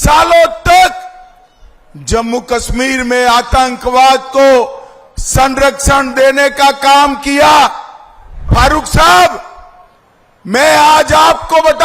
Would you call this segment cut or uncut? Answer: cut